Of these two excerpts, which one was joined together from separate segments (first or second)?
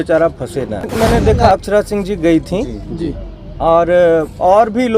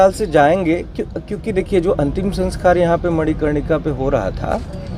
first